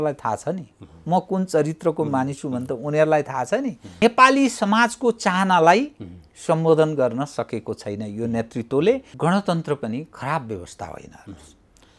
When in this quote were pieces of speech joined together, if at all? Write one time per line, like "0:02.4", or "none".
0:03.8
0:09.1